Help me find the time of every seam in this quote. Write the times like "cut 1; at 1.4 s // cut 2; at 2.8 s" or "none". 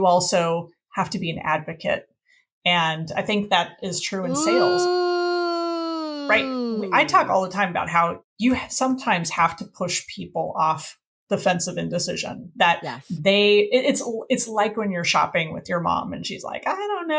cut 1; at 8.2 s